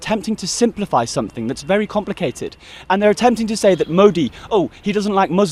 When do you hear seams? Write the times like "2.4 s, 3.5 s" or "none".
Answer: none